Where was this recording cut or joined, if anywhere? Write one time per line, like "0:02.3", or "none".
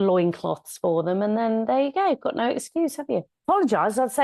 0:03.3